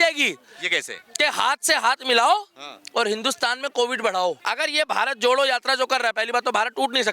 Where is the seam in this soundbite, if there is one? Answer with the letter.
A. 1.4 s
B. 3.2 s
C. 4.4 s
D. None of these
C